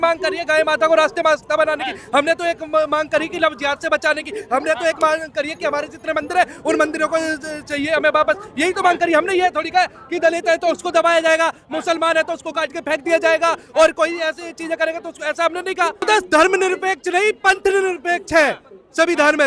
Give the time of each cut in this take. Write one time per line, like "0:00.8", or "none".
0:16.0